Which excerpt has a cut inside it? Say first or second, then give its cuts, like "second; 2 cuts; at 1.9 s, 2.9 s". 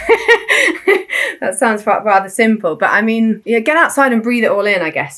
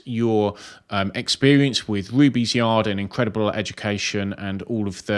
first; 1 cut; at 3.4 s